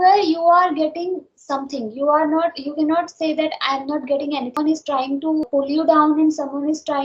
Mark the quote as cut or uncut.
cut